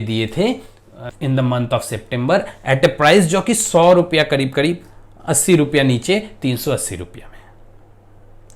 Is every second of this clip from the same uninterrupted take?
no; 1 cut; at 1.0 s

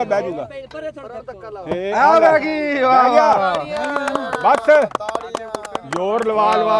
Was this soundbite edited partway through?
no; 0 cuts

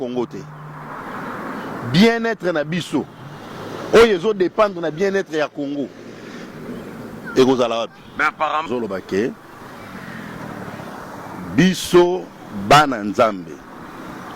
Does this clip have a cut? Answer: yes; 1 cut; at 8.7 s

